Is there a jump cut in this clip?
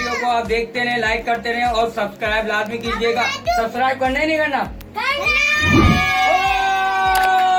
no; 0 cuts

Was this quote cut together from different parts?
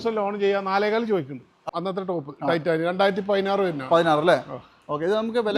yes; 1 cut; at 1.6 s

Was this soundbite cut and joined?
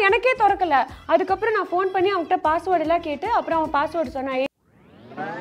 no; 0 cuts

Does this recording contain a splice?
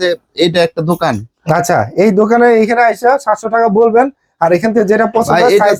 no; 0 cuts

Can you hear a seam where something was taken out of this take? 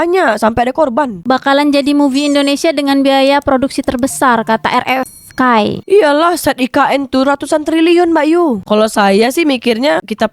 yes; 2 cuts; at 1.2 s, 8.6 s

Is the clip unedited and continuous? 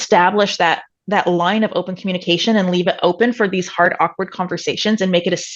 yes; 0 cuts

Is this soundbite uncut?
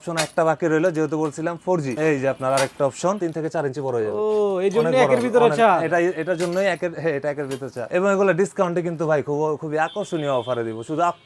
no; 3 cuts; at 1.9 s, 3.2 s, 7.9 s

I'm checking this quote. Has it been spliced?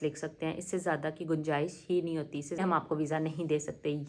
yes; 1 cut; at 2.6 s

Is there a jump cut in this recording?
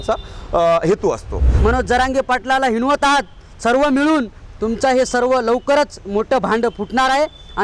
yes; 1 cut; at 1.5 s

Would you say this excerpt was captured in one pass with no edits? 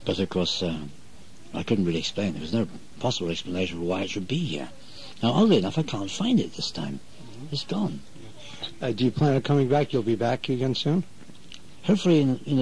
no; 1 cut; at 9.0 s

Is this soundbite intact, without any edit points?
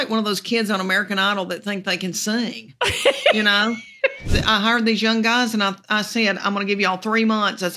no; 1 cut; at 4.3 s

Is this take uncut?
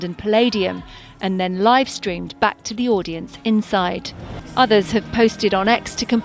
no; 1 cut; at 4.2 s

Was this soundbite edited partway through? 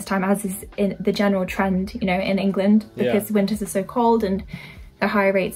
no; 0 cuts

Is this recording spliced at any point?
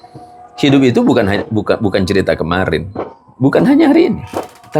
no; 0 cuts

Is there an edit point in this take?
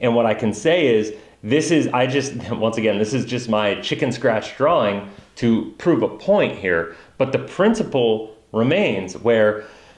no; 0 cuts

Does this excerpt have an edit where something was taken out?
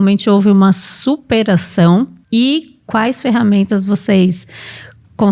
yes; 1 cut; at 2.2 s

